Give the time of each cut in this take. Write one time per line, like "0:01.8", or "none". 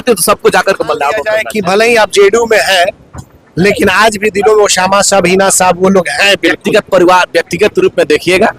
0:01.4